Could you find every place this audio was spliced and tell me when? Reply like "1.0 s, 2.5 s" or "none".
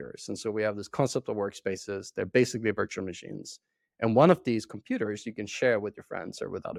none

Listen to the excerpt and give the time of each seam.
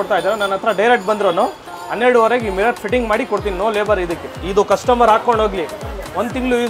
4.3 s

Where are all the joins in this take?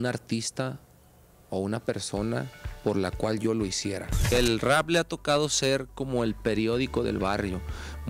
4.3 s

